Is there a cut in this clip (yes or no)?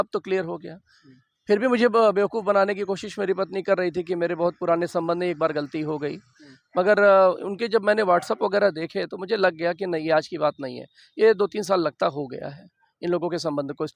no